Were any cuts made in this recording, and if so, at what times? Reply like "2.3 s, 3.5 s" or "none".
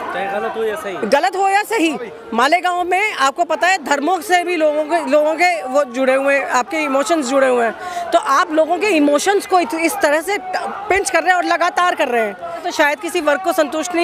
12.7 s